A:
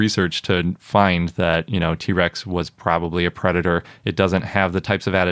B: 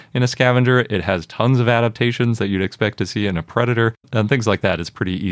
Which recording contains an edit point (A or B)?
B